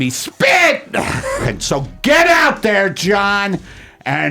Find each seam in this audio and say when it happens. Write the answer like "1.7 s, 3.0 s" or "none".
1.5 s